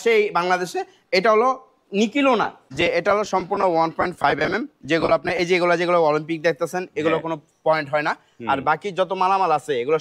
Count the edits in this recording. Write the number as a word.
one